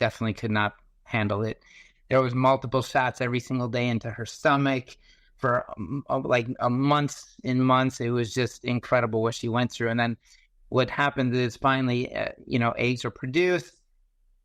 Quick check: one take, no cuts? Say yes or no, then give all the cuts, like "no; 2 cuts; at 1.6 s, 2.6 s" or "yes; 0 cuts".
yes; 0 cuts